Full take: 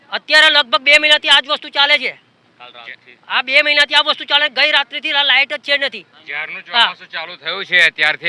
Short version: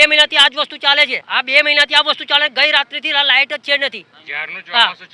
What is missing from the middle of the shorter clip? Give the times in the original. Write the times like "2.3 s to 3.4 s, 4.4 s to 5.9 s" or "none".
2.1 s to 3.2 s